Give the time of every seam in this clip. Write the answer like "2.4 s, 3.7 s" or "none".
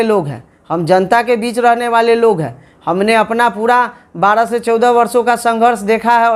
none